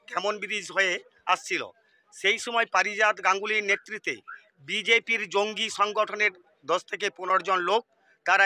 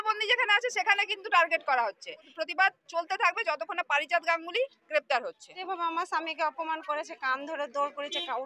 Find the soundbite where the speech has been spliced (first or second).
second